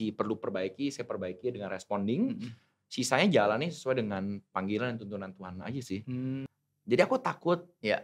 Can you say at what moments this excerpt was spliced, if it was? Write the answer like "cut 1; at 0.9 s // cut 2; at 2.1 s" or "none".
cut 1; at 6.5 s